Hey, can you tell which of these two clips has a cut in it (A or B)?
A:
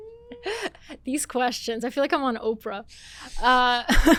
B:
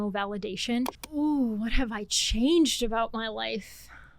B